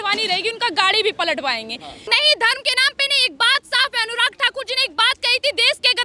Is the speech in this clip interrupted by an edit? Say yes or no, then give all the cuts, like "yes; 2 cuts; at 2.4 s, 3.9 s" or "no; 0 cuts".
yes; 1 cut; at 2.0 s